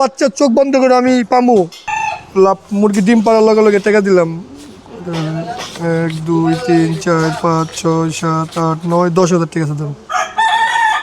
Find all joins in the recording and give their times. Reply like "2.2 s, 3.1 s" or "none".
1.9 s